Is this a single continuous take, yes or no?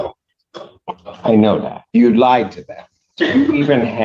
no